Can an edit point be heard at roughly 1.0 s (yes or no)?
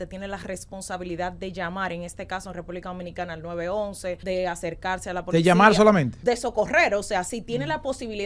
no